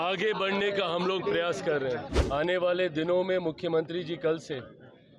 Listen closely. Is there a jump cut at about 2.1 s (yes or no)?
yes